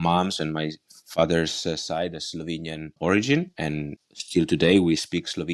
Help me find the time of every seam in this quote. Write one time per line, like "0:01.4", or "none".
none

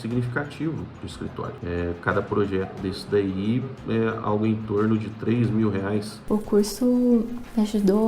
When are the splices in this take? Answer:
0:06.2

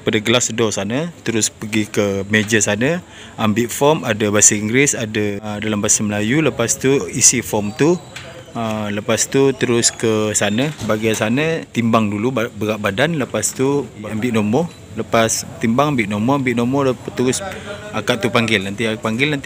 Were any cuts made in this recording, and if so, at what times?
0:05.4
0:11.7
0:14.0

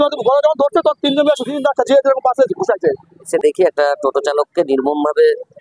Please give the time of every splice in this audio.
0:03.3

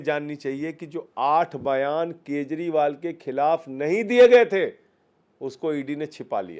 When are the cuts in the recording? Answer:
none

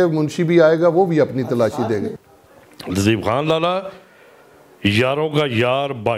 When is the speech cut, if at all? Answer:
0:02.2

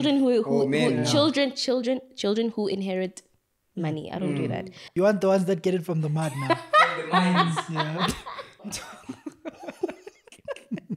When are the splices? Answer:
0:04.8
0:08.9

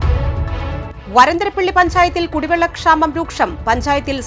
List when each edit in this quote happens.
0:00.9

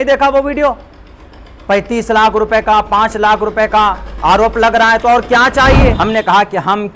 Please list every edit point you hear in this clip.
0:06.0

